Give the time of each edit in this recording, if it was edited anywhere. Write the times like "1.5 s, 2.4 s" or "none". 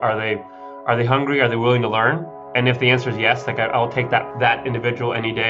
none